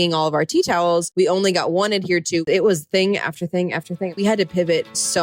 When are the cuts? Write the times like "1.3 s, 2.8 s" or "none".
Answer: 1.1 s, 2.4 s, 4.2 s